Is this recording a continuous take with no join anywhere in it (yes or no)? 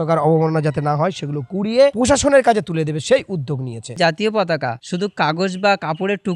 no